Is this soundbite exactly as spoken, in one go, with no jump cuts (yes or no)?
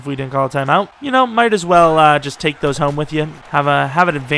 no